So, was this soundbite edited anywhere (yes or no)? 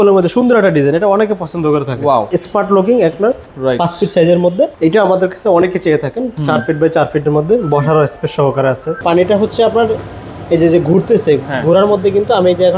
yes